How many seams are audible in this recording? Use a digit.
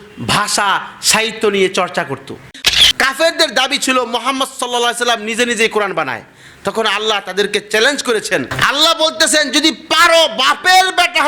2